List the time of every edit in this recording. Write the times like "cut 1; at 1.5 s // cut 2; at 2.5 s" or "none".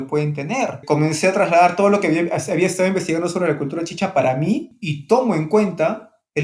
cut 1; at 0.8 s // cut 2; at 4.7 s